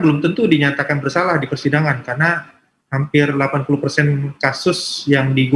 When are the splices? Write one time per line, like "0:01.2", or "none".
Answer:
none